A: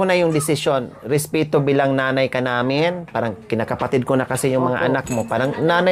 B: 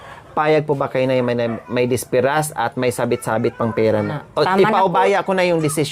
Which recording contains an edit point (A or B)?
B